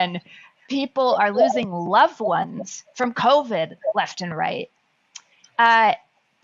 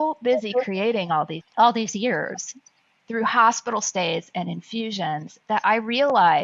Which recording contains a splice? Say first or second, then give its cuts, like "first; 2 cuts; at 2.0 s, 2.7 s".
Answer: second; 1 cut; at 1.4 s